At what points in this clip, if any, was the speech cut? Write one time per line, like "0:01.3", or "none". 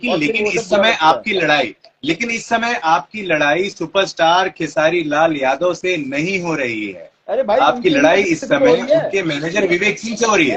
none